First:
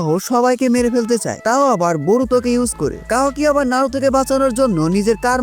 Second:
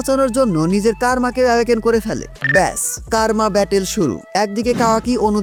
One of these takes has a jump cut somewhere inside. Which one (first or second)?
first